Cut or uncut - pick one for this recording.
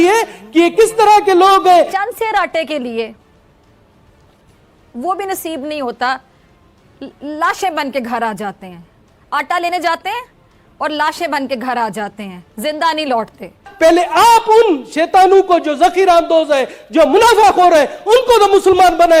cut